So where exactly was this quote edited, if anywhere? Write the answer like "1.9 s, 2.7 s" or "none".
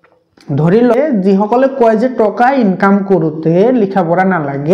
0.9 s